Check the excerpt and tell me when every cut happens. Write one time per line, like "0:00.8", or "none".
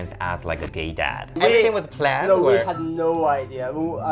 0:01.4

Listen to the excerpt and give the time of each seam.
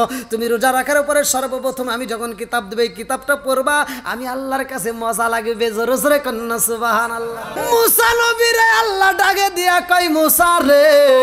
0:07.6

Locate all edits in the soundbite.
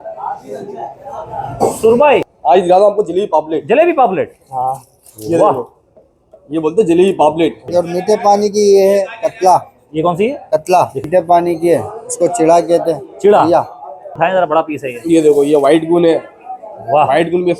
0:02.3
0:07.6
0:11.1
0:14.2

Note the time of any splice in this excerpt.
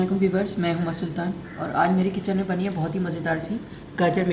none

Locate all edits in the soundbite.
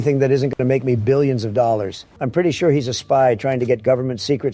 0:02.0

